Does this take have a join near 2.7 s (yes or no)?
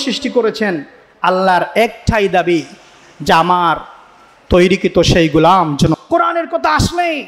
no